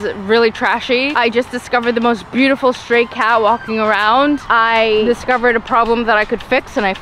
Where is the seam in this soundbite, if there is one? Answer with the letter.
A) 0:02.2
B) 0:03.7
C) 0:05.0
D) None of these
C